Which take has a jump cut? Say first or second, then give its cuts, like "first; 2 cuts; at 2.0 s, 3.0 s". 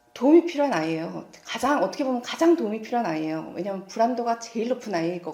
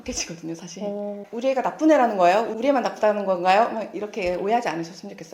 second; 2 cuts; at 1.2 s, 2.5 s